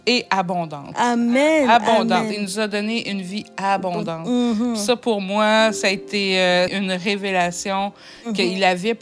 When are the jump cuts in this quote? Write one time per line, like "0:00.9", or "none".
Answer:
0:06.7